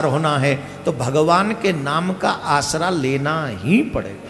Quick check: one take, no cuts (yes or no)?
yes